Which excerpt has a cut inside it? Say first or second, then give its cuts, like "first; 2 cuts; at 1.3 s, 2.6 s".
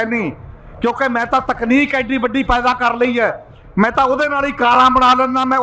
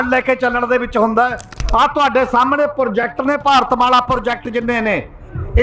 second; 1 cut; at 1.5 s